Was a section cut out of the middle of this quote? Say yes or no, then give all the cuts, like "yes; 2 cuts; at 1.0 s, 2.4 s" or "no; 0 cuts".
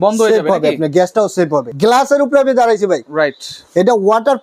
yes; 1 cut; at 1.7 s